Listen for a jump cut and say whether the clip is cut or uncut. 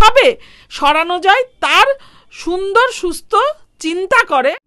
uncut